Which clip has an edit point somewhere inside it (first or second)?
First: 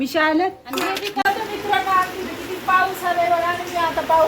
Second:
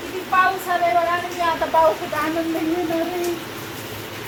first